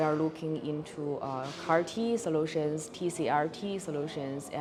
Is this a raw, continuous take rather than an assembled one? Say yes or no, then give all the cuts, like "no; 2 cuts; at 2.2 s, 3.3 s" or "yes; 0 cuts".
yes; 0 cuts